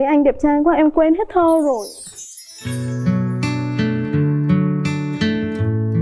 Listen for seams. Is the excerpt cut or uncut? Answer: uncut